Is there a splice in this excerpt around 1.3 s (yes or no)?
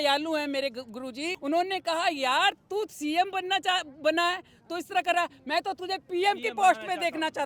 yes